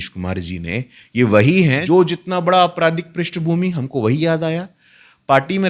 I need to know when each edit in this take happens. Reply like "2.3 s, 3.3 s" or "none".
1.8 s